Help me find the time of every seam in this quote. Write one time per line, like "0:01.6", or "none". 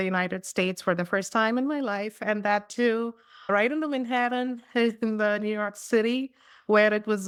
none